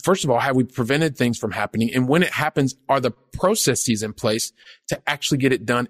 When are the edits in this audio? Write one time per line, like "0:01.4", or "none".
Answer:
none